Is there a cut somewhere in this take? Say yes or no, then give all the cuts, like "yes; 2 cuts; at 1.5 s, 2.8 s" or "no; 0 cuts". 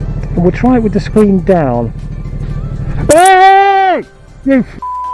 no; 0 cuts